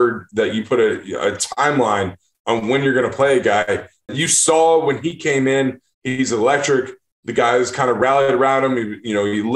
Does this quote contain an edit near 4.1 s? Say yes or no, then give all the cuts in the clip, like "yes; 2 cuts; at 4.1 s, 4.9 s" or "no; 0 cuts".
yes; 1 cut; at 4.1 s